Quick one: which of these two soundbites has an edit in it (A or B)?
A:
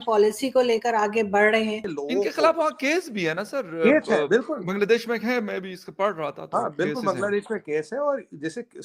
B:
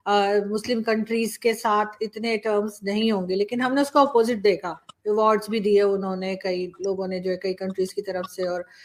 A